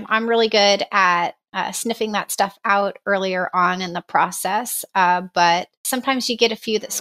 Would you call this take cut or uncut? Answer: cut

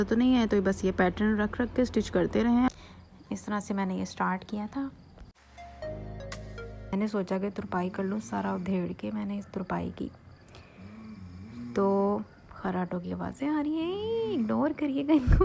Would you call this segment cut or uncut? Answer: cut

